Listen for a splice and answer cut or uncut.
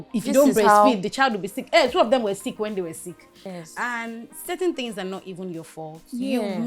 cut